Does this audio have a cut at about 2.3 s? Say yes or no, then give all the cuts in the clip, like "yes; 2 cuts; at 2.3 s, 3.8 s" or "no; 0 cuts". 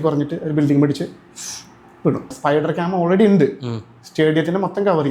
yes; 1 cut; at 2.3 s